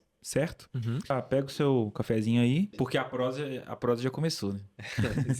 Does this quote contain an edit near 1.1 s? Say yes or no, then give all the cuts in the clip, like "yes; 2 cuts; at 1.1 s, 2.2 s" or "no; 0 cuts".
yes; 2 cuts; at 1.1 s, 2.7 s